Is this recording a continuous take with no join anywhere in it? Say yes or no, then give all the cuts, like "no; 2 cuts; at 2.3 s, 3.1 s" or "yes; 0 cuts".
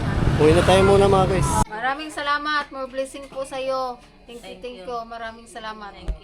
no; 1 cut; at 1.7 s